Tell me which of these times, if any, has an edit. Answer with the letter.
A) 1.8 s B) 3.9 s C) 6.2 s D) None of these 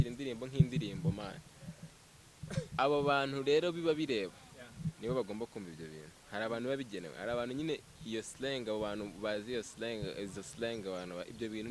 A